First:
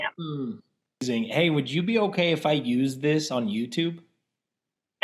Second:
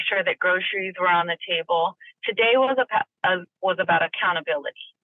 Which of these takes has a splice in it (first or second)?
first